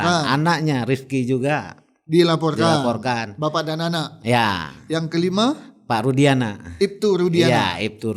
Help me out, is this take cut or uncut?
uncut